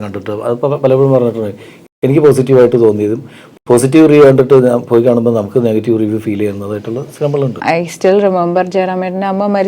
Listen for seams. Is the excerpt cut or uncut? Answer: cut